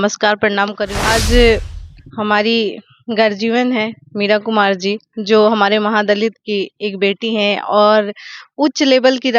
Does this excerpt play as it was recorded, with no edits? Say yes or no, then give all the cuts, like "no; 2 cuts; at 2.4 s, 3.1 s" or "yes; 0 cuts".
no; 1 cut; at 1.0 s